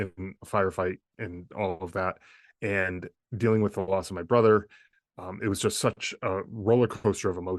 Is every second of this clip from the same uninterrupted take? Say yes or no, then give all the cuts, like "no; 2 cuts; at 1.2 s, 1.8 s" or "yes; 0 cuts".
no; 1 cut; at 1.1 s